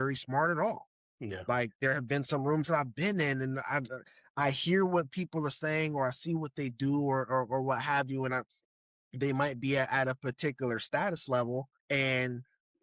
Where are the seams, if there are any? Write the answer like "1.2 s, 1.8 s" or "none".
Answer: 11.8 s